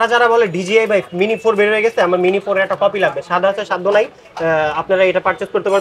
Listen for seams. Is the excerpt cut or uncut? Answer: uncut